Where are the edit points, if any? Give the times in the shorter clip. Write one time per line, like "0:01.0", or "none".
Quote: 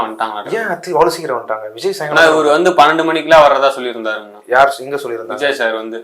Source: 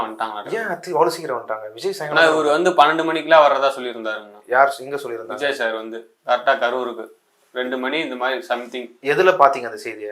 none

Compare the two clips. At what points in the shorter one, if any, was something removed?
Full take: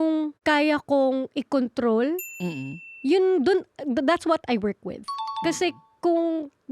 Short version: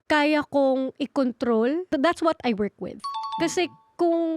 0:01.9

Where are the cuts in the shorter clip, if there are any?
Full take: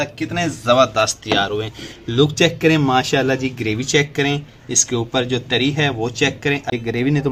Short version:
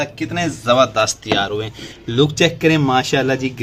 none

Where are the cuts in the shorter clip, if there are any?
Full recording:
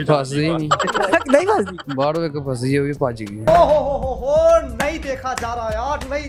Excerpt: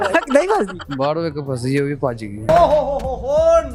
none

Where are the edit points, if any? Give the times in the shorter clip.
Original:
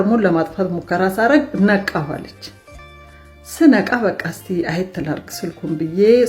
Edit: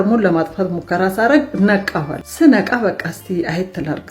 0:02.2

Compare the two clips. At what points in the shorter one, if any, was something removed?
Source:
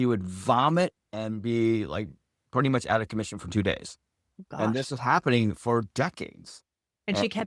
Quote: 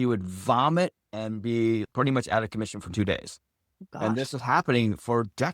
0:01.9

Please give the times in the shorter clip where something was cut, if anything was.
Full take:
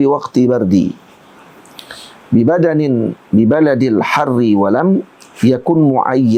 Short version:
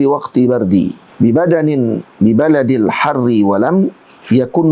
0:01.0

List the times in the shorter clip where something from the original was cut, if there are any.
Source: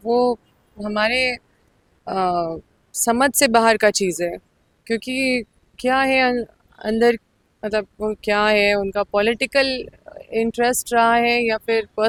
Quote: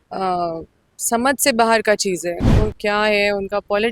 0:02.5

